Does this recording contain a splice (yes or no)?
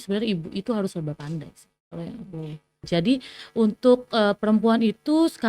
yes